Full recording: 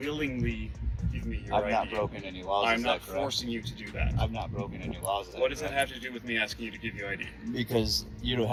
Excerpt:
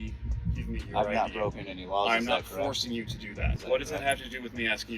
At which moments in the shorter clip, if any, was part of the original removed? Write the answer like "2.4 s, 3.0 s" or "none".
3.6 s